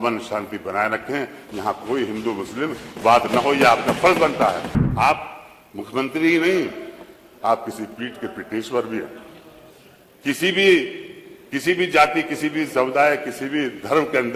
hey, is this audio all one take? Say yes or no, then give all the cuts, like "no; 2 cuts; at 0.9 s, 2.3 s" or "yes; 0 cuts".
no; 1 cut; at 4.8 s